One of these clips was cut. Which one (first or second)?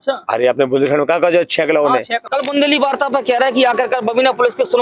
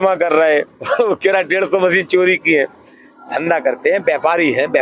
first